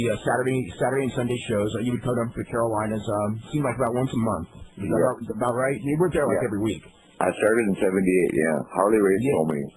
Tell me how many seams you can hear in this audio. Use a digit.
1